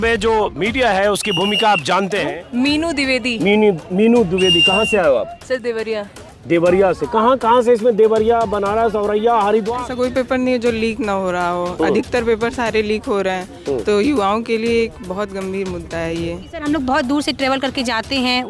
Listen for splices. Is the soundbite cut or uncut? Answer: cut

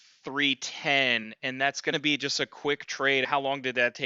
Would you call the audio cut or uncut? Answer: cut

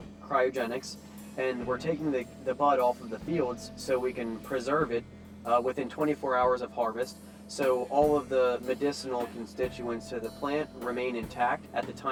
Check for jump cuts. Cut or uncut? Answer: uncut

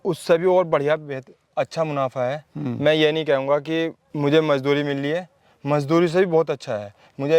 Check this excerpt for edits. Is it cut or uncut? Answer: cut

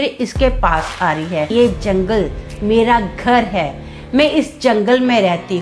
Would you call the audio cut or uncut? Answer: cut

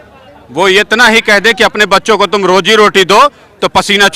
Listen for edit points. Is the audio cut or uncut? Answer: uncut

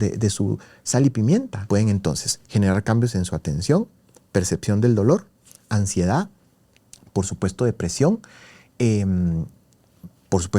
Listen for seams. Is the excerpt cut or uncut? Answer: cut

